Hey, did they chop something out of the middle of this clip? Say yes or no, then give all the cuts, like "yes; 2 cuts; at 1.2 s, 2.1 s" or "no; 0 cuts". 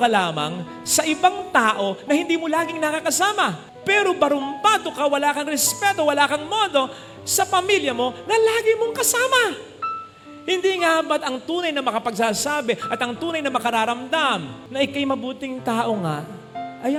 no; 0 cuts